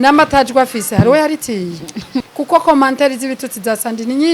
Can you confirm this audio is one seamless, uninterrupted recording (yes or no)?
no